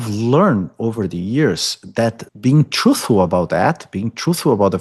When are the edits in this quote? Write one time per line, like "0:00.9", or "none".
0:02.2